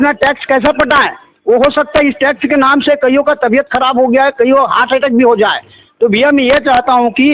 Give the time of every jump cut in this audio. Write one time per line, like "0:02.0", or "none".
none